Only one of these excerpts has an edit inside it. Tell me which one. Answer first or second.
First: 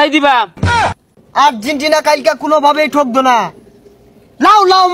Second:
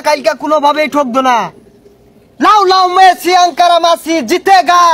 first